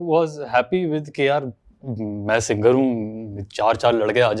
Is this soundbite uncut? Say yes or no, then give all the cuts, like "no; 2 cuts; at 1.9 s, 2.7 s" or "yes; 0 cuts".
yes; 0 cuts